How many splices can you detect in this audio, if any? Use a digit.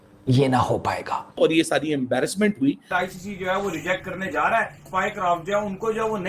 3